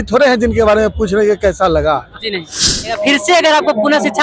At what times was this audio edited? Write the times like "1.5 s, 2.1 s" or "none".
2.8 s